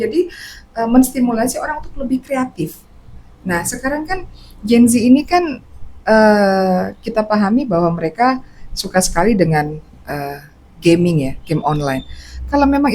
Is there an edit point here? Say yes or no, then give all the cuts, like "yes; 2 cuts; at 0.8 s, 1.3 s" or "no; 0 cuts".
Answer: no; 0 cuts